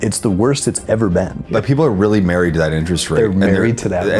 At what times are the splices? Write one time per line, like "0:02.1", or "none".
0:01.5